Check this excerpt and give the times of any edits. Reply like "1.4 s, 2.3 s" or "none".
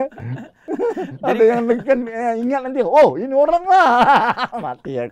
none